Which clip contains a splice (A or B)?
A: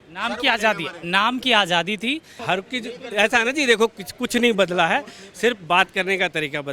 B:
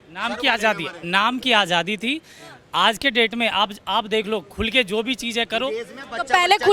A